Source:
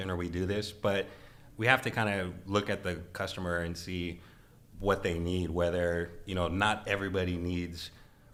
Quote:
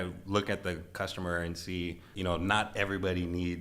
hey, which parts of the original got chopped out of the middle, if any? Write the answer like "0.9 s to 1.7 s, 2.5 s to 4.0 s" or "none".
4.3 s to 6.2 s